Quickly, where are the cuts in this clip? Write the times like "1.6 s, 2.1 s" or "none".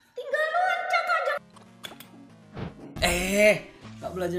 1.4 s